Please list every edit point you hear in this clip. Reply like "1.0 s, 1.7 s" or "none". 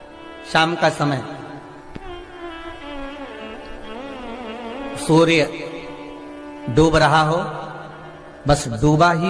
none